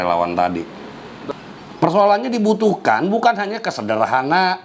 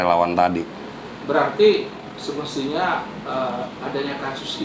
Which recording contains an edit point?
first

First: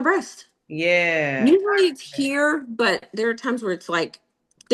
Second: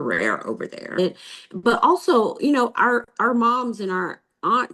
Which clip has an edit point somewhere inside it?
second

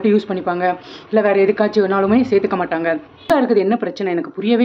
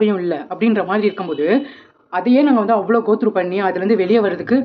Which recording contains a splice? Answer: first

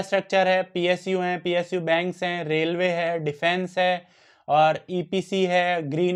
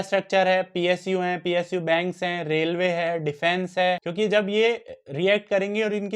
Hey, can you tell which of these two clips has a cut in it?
second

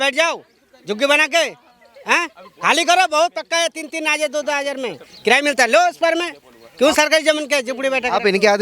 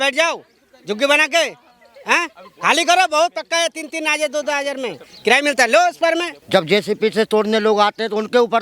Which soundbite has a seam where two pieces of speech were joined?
second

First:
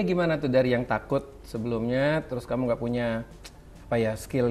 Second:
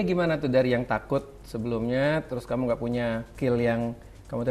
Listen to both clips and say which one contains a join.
second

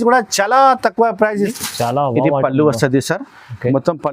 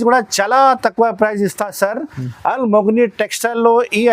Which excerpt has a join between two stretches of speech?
first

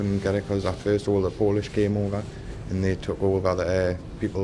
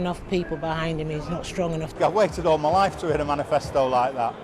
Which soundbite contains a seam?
second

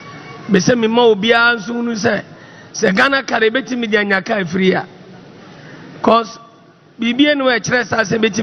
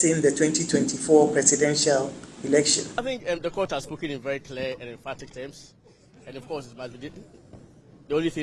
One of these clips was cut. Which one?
second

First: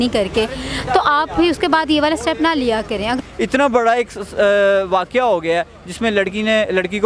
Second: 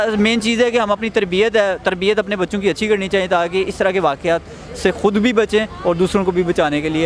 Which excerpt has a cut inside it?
first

